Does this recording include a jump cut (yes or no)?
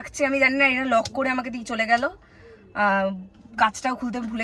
no